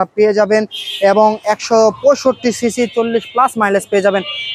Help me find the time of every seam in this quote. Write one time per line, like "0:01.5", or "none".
none